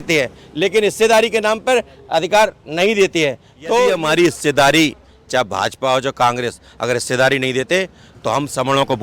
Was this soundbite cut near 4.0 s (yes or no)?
yes